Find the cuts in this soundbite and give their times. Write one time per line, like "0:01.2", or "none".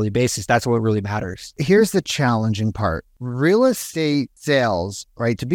0:01.6
0:03.2
0:04.0